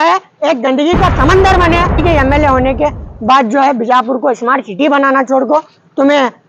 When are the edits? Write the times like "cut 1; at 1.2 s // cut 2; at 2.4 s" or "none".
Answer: cut 1; at 2.0 s